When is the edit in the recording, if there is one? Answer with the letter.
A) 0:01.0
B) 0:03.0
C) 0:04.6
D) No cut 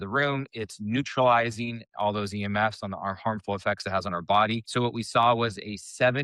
C